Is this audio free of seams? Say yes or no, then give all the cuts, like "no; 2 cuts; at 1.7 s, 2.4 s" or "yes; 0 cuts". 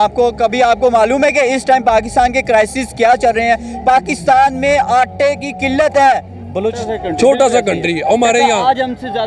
no; 1 cut; at 6.8 s